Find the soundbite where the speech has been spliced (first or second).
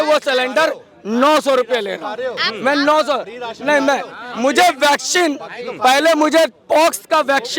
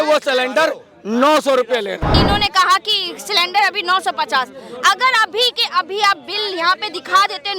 second